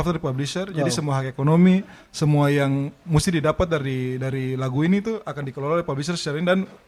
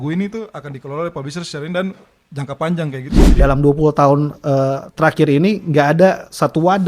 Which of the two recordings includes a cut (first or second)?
second